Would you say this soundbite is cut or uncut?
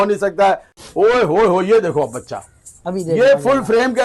cut